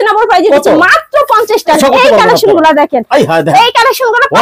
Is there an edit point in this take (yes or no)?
yes